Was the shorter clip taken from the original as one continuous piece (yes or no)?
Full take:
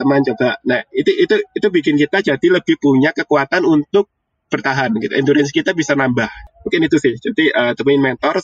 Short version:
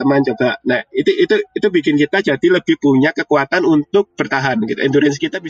no